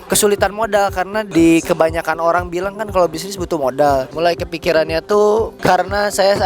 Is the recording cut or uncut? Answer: cut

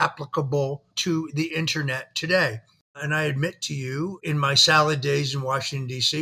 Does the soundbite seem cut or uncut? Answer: cut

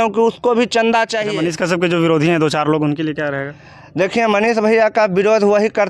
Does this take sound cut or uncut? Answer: cut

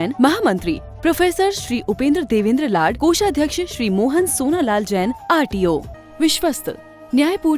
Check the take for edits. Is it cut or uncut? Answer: cut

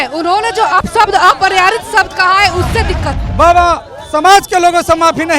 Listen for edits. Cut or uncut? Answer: cut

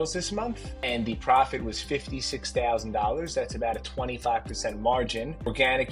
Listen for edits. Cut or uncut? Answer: uncut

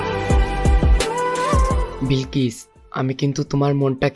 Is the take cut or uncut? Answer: cut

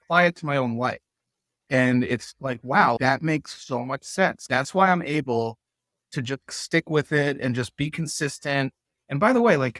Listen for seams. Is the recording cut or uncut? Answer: cut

